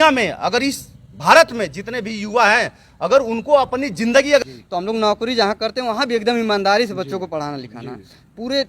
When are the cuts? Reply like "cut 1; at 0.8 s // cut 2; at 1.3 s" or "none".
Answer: cut 1; at 4.4 s